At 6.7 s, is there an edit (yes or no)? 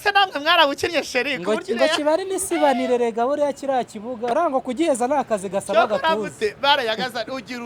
no